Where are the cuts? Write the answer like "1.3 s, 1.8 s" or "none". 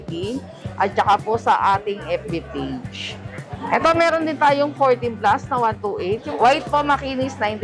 3.6 s, 6.3 s